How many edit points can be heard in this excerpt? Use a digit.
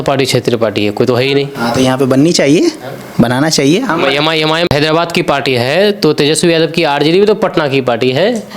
1